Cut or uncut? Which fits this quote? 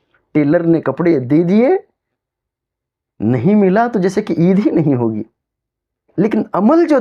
cut